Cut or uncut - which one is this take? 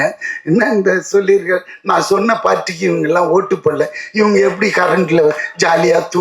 uncut